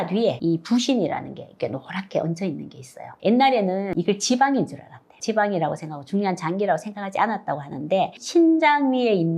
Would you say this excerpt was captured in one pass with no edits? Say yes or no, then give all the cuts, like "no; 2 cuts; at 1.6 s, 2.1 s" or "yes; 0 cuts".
yes; 0 cuts